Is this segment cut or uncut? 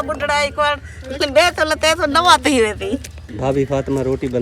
uncut